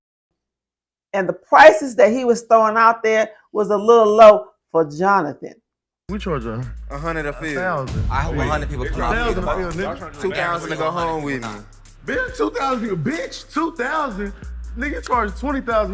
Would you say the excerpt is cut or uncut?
uncut